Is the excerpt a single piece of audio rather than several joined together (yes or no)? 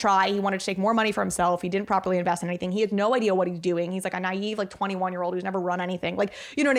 yes